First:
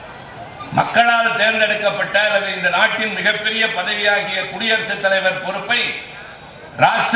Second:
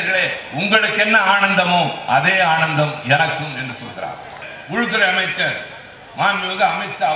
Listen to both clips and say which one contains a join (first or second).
second